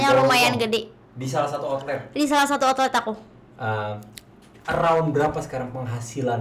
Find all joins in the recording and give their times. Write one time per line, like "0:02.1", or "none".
0:03.4